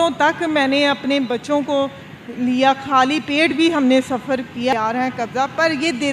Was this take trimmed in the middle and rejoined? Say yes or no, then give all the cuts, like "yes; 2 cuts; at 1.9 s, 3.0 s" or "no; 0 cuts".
yes; 1 cut; at 4.7 s